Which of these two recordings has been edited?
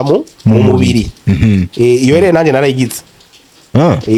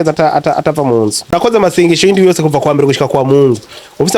second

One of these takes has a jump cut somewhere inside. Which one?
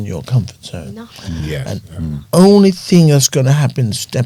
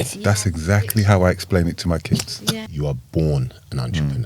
second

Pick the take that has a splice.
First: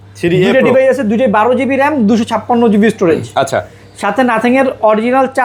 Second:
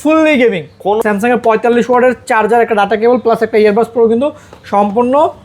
second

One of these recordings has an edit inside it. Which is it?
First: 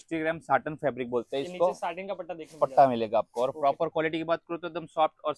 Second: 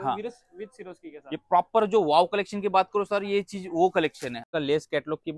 second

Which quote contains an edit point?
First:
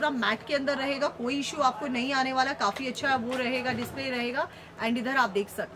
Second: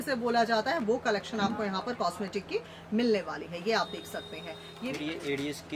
second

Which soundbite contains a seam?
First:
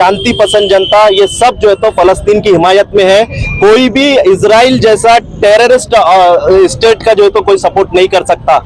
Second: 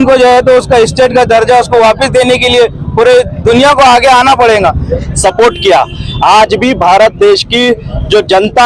second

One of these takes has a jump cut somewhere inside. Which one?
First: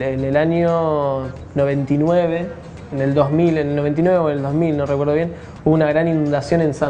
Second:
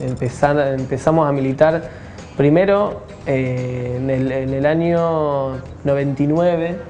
first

